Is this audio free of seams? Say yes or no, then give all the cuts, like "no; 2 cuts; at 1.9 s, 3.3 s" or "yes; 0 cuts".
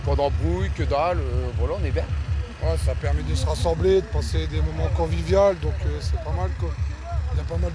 yes; 0 cuts